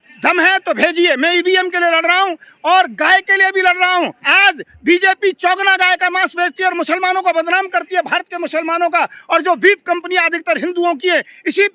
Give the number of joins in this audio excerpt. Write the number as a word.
one